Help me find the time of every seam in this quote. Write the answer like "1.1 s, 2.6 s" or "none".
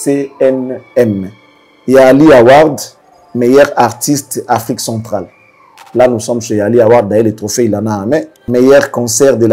8.4 s